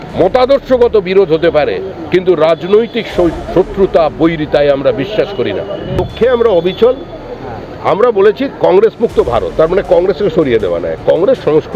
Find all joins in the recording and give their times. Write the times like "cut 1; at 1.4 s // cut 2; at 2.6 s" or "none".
cut 1; at 5.9 s